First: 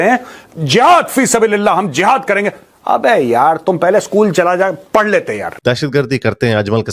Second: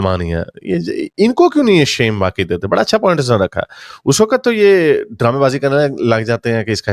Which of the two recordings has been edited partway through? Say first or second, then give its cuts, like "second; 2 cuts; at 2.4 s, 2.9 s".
first; 1 cut; at 5.5 s